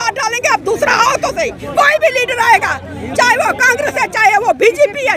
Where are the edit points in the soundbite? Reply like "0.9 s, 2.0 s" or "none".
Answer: none